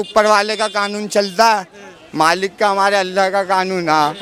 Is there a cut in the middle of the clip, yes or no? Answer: no